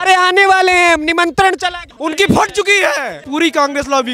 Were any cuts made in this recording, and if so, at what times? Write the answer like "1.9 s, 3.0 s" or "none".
1.9 s, 3.2 s